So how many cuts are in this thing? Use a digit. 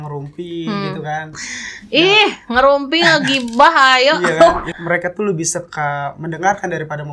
1